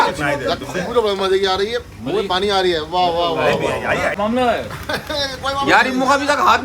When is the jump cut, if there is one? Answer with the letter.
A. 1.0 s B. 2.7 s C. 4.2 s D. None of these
C